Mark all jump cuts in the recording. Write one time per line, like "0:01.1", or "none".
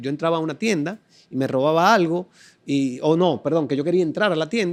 none